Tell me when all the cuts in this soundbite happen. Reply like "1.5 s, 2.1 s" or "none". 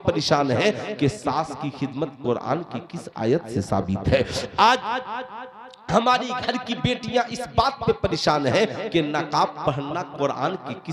none